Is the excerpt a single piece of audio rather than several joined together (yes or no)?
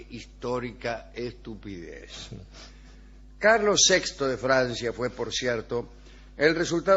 no